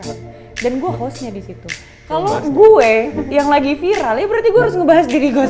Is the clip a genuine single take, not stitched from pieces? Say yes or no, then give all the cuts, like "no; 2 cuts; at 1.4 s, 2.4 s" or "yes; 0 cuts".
yes; 0 cuts